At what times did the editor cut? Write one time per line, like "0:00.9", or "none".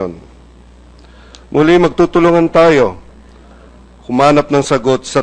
0:04.1